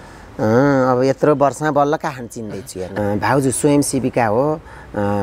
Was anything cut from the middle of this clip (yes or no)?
yes